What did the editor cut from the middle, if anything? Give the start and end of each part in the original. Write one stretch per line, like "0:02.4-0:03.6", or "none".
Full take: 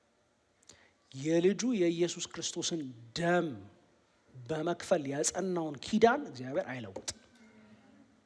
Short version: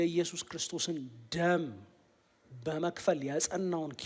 none